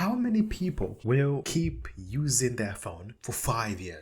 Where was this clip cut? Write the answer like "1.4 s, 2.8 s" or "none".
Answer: 1.3 s, 3.1 s